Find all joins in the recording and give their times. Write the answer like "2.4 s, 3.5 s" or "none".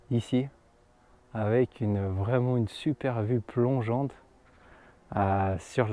none